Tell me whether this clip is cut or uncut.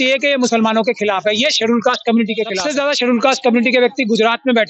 cut